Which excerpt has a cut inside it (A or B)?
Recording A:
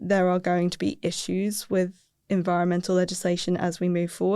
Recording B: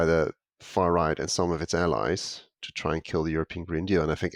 A